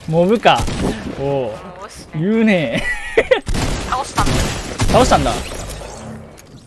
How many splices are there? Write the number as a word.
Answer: two